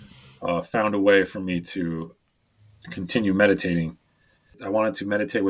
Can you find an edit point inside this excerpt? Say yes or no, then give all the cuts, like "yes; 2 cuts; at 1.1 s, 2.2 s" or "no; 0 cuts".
yes; 2 cuts; at 2.5 s, 4.5 s